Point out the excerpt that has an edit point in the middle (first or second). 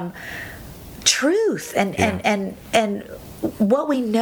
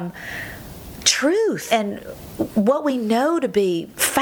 second